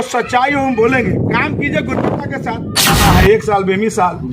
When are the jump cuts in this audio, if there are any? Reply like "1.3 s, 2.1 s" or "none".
2.9 s